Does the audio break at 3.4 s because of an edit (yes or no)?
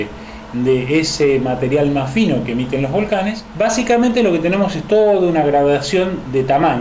yes